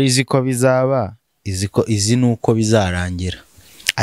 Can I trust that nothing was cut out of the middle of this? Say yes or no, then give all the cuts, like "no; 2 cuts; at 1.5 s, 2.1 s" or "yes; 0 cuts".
yes; 0 cuts